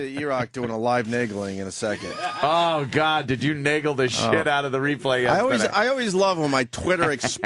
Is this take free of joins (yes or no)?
yes